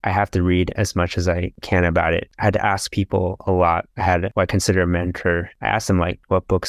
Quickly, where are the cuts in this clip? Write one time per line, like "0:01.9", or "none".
none